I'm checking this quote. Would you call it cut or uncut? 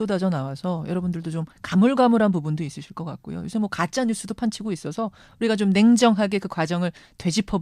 cut